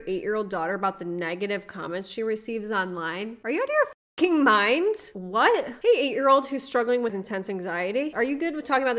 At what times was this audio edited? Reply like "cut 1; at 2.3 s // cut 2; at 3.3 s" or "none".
cut 1; at 7.2 s